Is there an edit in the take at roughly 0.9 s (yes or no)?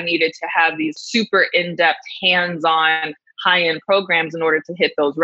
yes